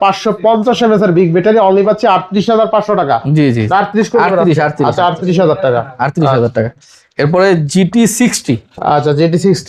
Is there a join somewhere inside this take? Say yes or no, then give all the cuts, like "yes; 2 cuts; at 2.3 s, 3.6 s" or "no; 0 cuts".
no; 0 cuts